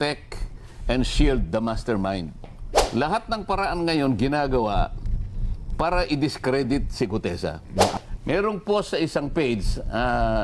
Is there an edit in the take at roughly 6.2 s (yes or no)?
no